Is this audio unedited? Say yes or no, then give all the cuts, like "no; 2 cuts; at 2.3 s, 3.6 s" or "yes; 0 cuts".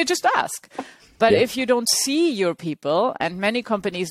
yes; 0 cuts